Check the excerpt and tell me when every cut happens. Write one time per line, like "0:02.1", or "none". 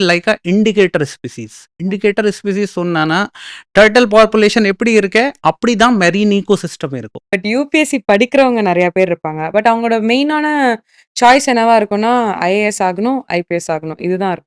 0:07.2